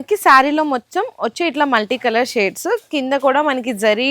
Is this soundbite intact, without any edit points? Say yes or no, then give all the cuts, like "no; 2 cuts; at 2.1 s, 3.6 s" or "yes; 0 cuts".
yes; 0 cuts